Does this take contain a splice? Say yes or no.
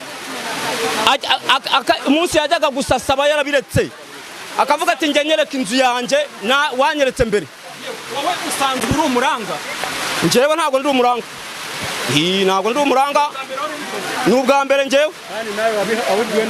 no